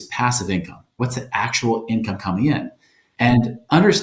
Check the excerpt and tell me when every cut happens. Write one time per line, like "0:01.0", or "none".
0:01.0
0:03.1